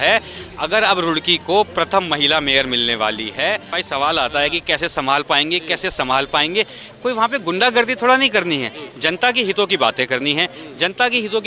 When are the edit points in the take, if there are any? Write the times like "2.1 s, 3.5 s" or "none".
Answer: 3.8 s